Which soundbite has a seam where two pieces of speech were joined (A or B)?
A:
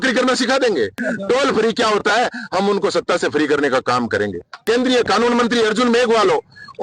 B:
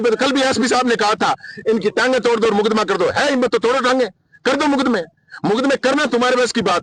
A